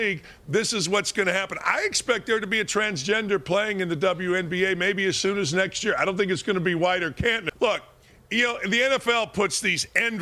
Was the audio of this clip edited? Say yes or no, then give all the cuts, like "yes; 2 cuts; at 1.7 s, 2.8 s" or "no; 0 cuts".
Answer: yes; 1 cut; at 7.5 s